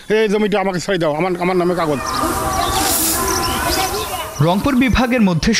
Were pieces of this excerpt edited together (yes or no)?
no